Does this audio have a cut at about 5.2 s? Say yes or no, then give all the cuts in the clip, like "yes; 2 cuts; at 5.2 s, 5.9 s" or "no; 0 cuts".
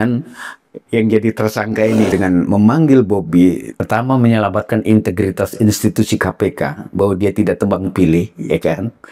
no; 2 cuts; at 2.1 s, 3.7 s